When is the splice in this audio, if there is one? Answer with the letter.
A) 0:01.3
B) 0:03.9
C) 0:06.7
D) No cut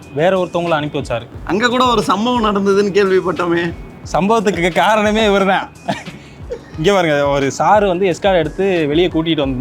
A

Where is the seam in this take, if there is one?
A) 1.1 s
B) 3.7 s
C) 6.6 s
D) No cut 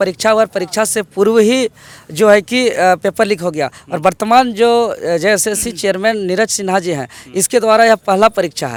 D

